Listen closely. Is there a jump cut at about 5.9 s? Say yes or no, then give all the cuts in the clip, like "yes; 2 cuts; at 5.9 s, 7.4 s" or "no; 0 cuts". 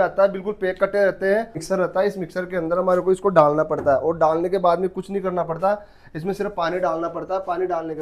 no; 1 cut; at 1.6 s